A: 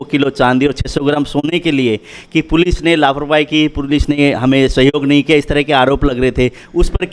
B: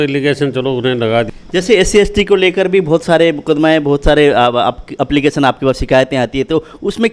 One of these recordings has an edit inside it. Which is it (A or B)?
B